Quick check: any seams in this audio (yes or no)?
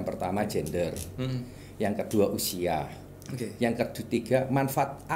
no